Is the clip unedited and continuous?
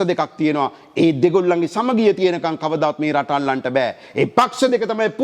yes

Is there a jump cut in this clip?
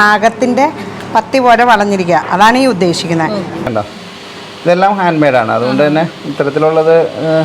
yes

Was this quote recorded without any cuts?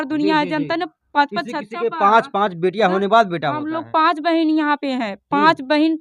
yes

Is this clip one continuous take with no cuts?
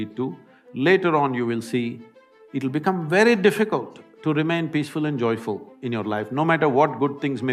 yes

